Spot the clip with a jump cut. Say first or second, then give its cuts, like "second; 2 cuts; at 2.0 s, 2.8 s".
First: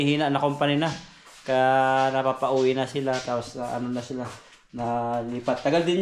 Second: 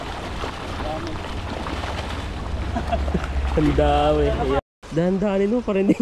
second; 1 cut; at 4.6 s